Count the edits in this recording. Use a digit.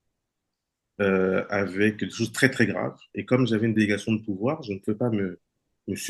0